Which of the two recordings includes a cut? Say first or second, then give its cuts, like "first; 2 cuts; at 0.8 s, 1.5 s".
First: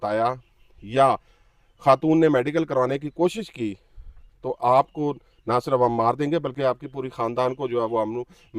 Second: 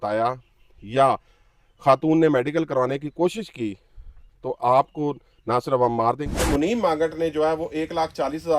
second; 1 cut; at 6.4 s